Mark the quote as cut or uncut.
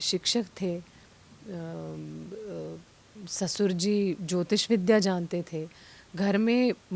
uncut